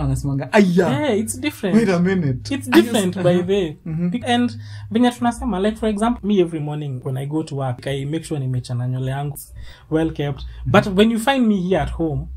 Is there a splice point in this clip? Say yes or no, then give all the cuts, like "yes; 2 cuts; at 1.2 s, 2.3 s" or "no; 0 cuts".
yes; 5 cuts; at 4.2 s, 6.2 s, 7.0 s, 7.8 s, 9.4 s